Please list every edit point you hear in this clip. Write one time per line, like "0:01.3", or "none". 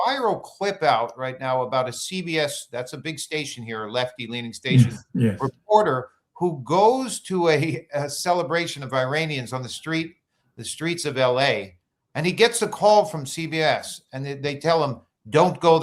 none